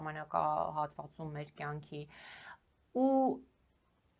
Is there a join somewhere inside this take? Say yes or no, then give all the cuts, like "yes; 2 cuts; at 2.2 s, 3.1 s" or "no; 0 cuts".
no; 0 cuts